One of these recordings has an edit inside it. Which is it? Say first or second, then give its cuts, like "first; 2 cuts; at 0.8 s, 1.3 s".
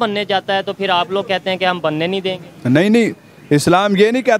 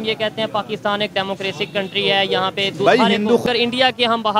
second; 1 cut; at 3.4 s